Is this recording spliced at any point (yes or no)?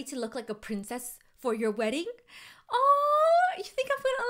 no